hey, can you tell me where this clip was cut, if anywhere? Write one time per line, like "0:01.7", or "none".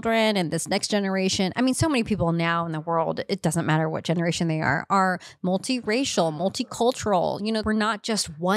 0:07.6

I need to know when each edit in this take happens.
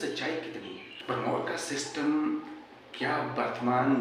0:01.0

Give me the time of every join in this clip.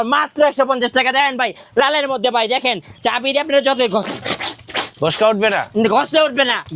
0:02.9

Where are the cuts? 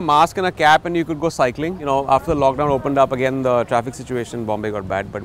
0:01.7

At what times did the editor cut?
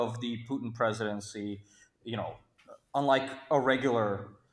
none

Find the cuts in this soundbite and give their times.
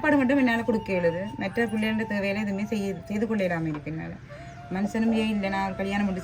none

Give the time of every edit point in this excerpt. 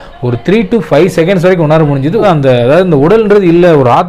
0:02.2

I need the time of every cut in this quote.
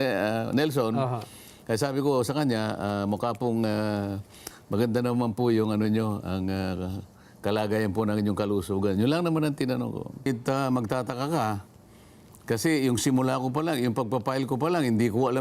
0:10.3

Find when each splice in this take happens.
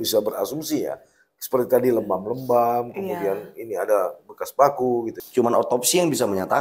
0:05.2

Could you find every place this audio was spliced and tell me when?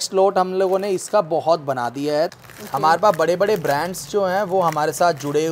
0:02.3

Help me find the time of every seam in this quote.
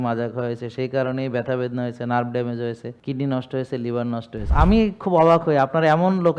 0:02.9
0:04.4

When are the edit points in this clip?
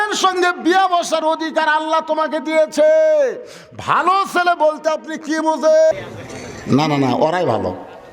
0:05.9

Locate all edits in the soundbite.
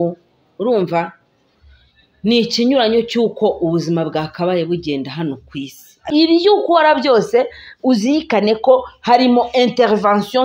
0:06.0

